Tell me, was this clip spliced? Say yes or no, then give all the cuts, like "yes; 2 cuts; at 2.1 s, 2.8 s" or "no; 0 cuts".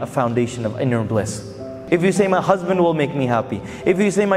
yes; 1 cut; at 1.8 s